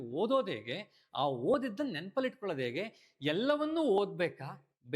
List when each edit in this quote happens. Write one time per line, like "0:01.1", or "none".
none